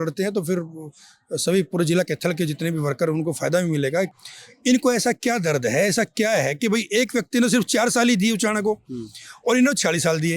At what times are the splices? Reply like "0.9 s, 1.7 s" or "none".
4.1 s